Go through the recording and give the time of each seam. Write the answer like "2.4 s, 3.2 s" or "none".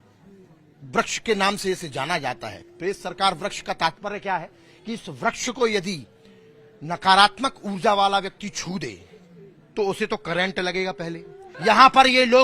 11.5 s